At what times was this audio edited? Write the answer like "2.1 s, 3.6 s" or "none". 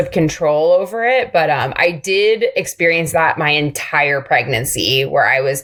none

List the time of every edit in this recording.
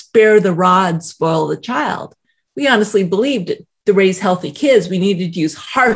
none

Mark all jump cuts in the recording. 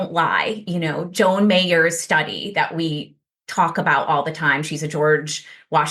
none

